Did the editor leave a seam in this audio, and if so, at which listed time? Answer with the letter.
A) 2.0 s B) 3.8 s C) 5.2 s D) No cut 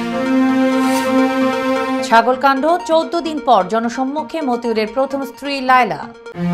A